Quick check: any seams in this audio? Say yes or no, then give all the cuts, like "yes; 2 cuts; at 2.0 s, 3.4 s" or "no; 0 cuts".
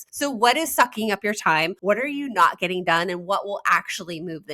yes; 1 cut; at 1.7 s